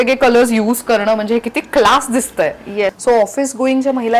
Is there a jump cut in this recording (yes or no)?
yes